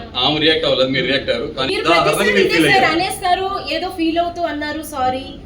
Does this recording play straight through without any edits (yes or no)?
no